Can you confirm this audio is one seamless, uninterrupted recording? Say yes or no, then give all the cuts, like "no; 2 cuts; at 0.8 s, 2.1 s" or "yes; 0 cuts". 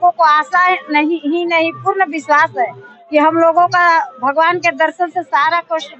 yes; 0 cuts